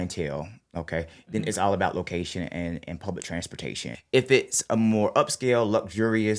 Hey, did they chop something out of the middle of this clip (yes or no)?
yes